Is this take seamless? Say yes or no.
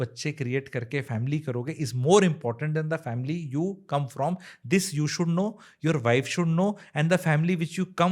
yes